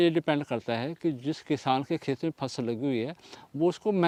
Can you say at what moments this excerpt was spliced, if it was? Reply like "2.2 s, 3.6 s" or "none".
none